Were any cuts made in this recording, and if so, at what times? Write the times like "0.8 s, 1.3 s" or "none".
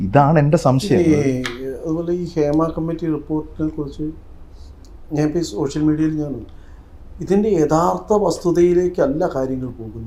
none